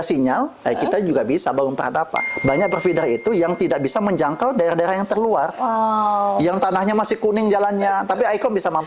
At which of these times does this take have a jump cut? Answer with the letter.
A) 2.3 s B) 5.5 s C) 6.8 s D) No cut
A